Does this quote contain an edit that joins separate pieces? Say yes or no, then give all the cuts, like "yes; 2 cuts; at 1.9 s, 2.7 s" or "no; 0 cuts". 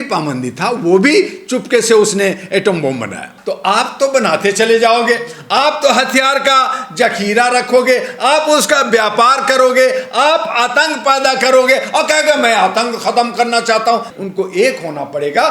yes; 2 cuts; at 3.3 s, 14.1 s